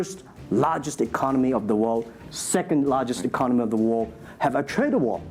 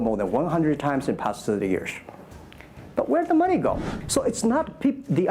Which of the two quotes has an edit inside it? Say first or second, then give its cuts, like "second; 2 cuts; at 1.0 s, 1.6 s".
second; 1 cut; at 3.9 s